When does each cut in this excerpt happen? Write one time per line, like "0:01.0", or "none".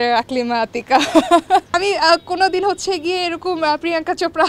0:01.7

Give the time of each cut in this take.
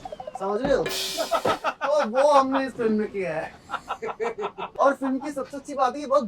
0:04.7

